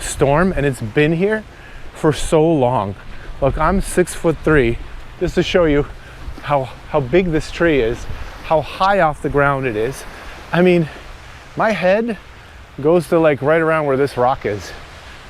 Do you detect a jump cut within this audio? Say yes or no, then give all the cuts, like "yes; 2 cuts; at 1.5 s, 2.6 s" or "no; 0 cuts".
no; 0 cuts